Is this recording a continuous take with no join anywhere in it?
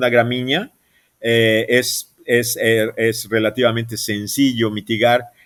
yes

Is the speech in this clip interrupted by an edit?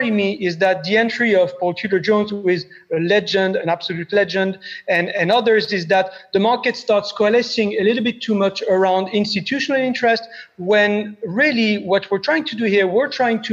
no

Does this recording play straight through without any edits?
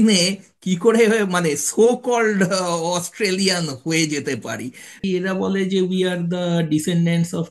no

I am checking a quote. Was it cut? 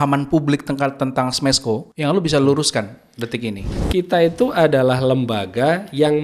yes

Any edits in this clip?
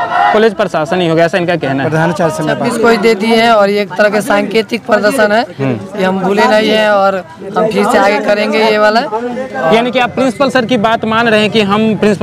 yes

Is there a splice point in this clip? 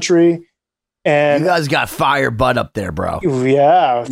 no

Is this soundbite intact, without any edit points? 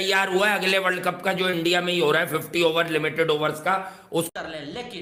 yes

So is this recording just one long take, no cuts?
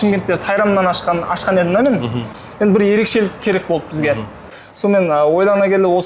no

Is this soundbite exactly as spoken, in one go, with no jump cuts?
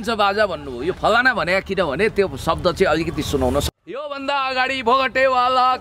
no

